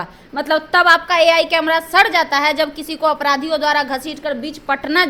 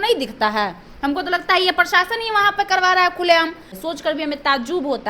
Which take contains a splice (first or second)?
second